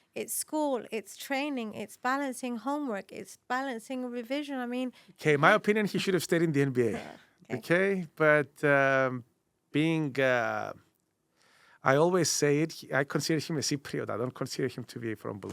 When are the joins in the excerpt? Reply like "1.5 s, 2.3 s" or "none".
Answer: 5.1 s